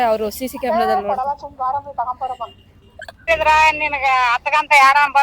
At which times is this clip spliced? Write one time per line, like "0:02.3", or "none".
0:03.3